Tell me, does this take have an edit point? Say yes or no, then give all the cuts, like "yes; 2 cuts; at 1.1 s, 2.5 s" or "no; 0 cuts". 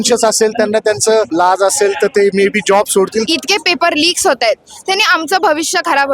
yes; 2 cuts; at 1.3 s, 3.2 s